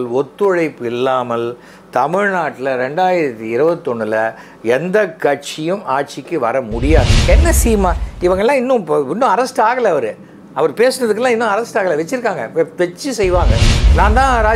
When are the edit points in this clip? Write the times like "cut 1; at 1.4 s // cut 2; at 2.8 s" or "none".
cut 1; at 7.2 s

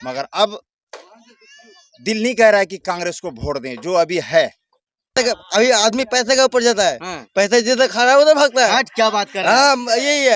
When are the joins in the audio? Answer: cut 1; at 5.1 s

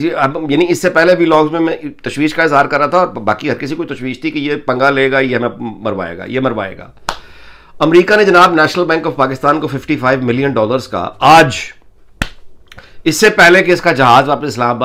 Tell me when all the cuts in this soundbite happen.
none

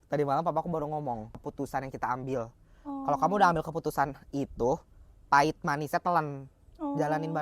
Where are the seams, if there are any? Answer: cut 1; at 1.3 s

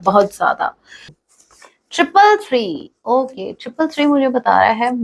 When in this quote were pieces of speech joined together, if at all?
cut 1; at 1.1 s

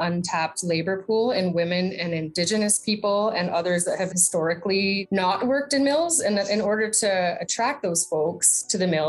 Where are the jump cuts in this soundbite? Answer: cut 1; at 5.0 s

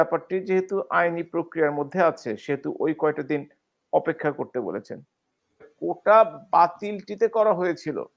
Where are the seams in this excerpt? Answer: cut 1; at 5.7 s

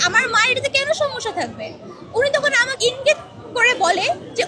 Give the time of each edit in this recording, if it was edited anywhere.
cut 1; at 2.7 s

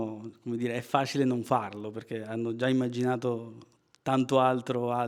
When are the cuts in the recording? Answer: none

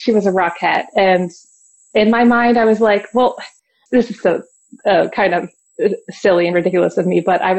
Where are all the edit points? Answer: cut 1; at 3.8 s // cut 2; at 5.6 s

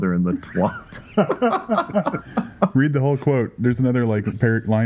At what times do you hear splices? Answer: none

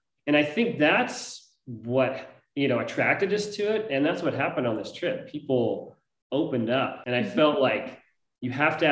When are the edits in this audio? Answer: cut 1; at 7.0 s

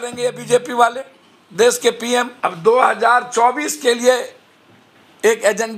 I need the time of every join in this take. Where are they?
cut 1; at 2.3 s

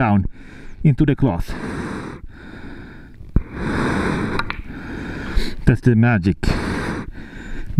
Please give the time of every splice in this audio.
none

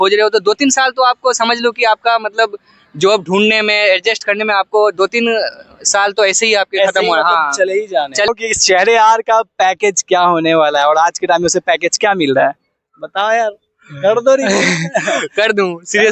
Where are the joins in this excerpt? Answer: none

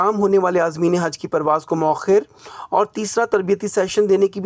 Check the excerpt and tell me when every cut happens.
none

